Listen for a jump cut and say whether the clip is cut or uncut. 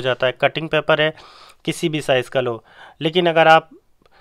uncut